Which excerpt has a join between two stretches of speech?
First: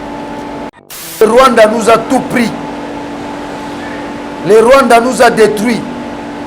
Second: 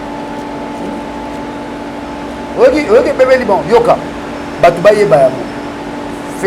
first; 1 cut; at 1.2 s

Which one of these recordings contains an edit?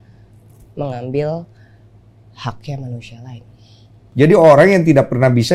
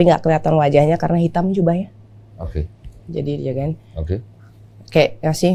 first; 1 cut; at 4.0 s

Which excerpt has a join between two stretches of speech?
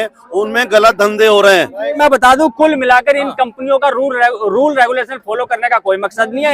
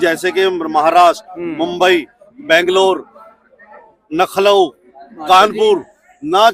first; 1 cut; at 2.0 s

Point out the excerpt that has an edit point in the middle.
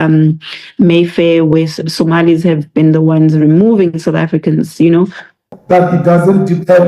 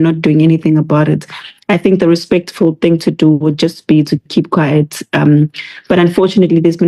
first; 1 cut; at 5.5 s

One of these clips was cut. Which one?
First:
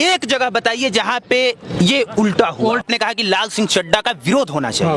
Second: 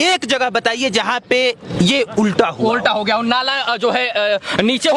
first; 1 cut; at 2.8 s

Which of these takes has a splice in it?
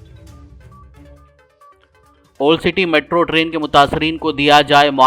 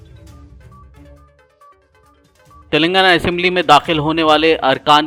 first; 1 cut; at 1.7 s

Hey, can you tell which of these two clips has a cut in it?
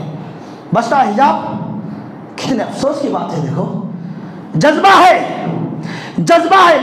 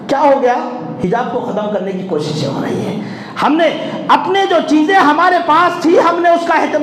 first; 1 cut; at 4.4 s

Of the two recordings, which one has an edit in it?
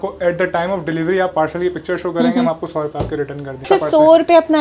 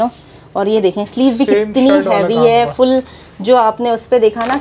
first; 1 cut; at 3.6 s

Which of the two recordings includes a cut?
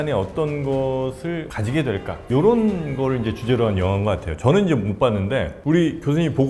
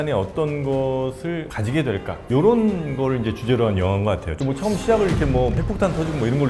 second; 1 cut; at 4.3 s

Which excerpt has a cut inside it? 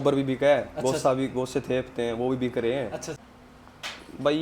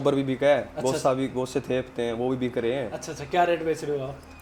first; 1 cut; at 3.1 s

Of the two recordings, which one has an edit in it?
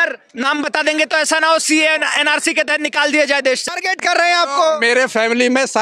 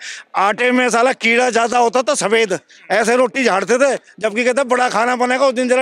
first; 1 cut; at 3.6 s

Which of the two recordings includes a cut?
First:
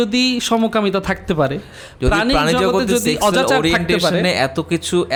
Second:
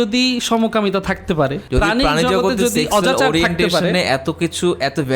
second; 1 cut; at 1.6 s

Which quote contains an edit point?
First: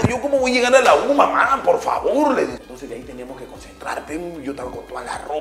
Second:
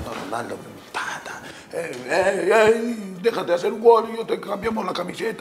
first; 1 cut; at 2.6 s

